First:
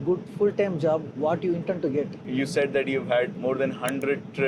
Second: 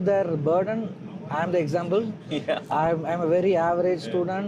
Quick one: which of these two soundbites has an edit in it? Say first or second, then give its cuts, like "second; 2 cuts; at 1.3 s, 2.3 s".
first; 2 cuts; at 2.2 s, 3.3 s